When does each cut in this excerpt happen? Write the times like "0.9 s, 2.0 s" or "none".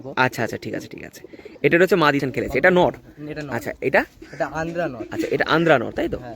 2.2 s

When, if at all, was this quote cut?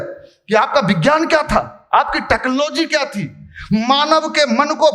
none

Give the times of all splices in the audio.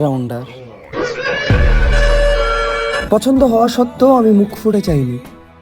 3.0 s

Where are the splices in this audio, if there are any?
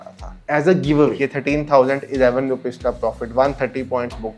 1.2 s

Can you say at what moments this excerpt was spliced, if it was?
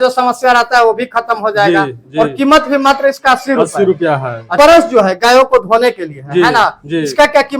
4.5 s

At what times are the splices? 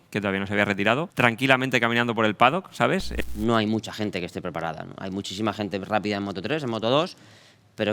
1.1 s, 3.1 s

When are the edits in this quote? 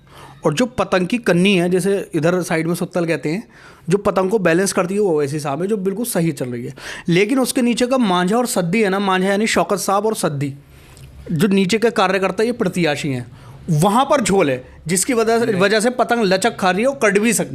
none

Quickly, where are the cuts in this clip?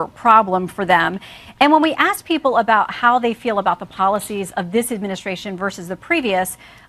none

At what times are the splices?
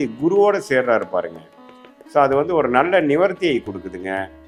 none

